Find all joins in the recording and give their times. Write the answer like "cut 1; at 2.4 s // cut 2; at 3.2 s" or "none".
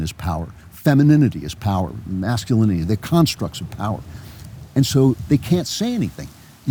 none